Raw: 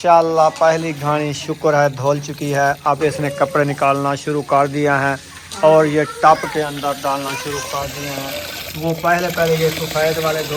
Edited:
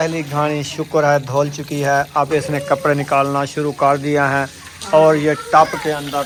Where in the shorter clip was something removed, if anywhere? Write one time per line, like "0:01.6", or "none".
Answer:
none